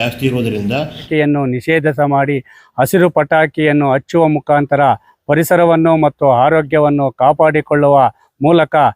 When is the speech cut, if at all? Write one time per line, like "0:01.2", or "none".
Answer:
0:01.1